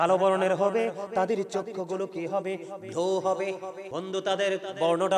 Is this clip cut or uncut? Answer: cut